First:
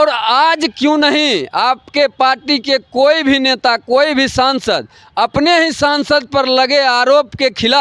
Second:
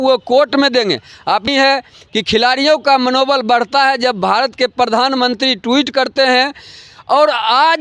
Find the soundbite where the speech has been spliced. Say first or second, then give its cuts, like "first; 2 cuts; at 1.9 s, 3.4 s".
second; 1 cut; at 1.5 s